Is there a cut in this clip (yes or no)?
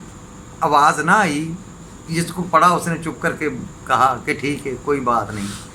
no